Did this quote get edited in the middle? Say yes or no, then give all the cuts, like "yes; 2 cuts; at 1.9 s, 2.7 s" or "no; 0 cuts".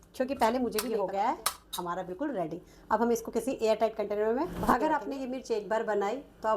yes; 2 cuts; at 0.9 s, 4.6 s